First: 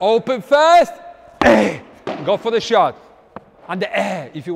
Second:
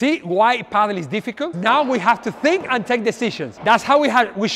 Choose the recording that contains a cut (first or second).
second